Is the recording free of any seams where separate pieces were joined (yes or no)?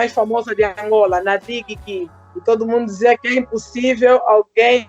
yes